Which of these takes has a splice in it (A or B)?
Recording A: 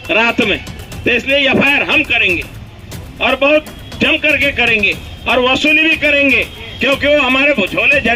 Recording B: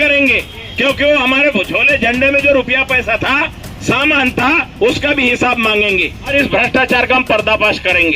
B